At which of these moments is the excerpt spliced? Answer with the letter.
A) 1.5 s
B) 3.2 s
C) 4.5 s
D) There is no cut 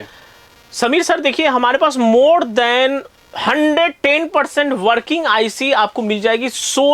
D